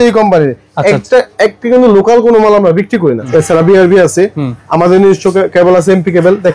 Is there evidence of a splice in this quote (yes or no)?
yes